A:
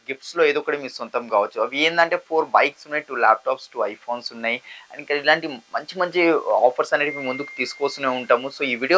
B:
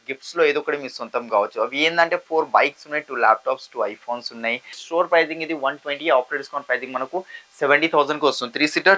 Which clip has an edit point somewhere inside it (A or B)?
B